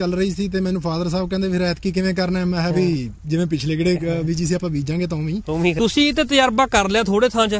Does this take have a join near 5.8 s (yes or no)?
yes